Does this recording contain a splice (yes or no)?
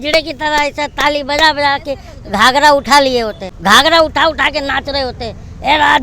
yes